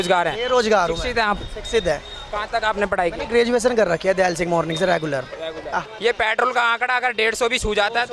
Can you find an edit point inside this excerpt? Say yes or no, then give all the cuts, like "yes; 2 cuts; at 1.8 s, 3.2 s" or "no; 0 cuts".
yes; 1 cut; at 5.9 s